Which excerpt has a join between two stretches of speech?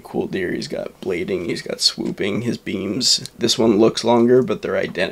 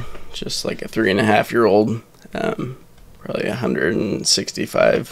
first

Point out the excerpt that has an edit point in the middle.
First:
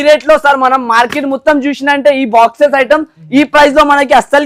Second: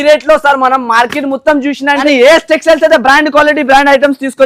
second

